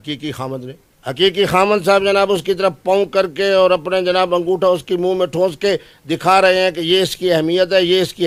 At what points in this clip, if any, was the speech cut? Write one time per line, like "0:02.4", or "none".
none